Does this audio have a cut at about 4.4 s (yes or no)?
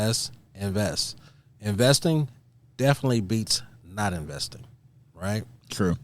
no